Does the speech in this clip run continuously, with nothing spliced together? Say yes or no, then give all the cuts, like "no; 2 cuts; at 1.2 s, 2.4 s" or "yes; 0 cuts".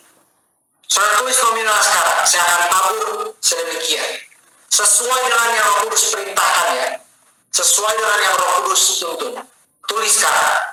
yes; 0 cuts